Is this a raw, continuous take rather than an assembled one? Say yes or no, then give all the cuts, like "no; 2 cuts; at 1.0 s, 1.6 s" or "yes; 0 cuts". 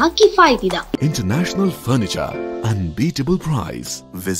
no; 1 cut; at 1.0 s